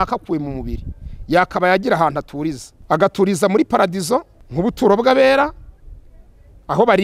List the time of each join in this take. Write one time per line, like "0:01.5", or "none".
0:02.7
0:04.4

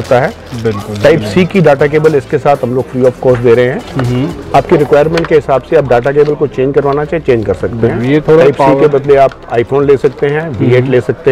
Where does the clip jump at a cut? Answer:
none

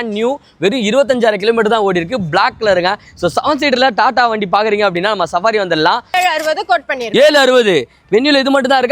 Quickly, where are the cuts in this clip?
0:06.2

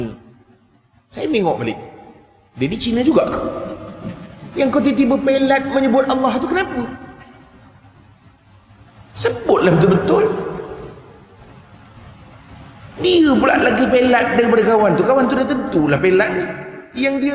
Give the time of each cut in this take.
none

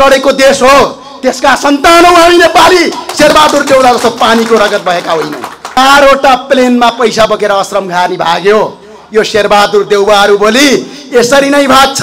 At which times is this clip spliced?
0:05.8

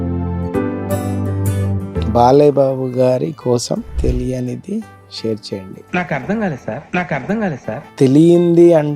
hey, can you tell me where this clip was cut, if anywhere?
0:02.1
0:07.9

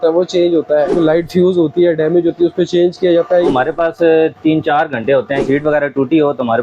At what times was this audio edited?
0:01.0
0:03.5
0:05.4

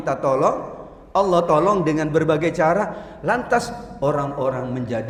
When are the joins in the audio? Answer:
none

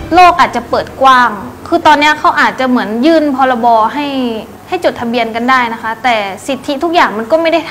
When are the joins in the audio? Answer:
0:04.5

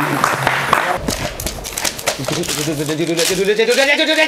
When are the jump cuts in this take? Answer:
0:01.0

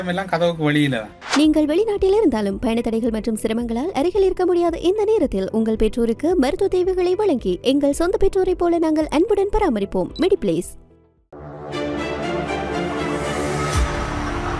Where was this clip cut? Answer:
0:01.1

